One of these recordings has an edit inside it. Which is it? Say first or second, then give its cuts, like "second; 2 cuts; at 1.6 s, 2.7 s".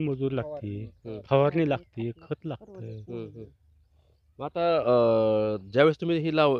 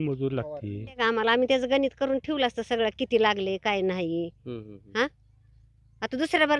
second; 1 cut; at 1.0 s